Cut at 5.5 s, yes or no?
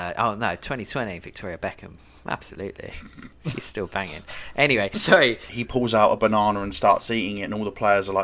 yes